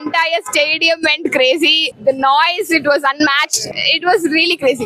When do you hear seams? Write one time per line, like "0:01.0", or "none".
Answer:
0:01.9
0:03.7